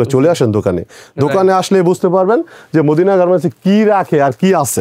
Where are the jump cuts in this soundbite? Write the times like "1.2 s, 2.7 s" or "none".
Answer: none